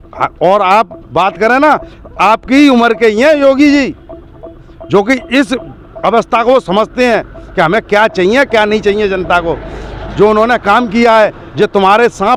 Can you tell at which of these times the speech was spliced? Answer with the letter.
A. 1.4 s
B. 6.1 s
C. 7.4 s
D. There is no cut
D